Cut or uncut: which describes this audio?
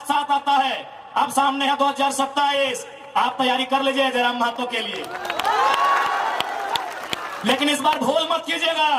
uncut